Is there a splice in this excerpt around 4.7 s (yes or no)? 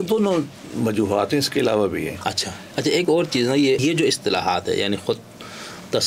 no